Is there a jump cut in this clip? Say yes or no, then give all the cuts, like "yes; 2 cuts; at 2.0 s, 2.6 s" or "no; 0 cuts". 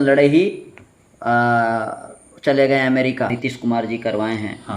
yes; 1 cut; at 3.3 s